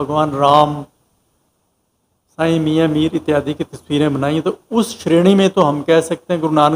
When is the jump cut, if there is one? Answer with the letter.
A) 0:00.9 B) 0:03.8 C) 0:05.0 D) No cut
D